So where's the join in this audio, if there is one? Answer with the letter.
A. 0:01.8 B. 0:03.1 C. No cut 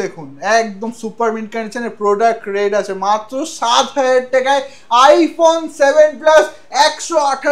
C